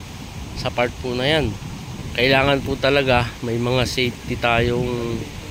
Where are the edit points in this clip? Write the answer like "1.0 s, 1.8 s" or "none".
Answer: 1.9 s